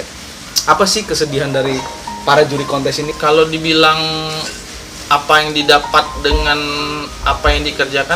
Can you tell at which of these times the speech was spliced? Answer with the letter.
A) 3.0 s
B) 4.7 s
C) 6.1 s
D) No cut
A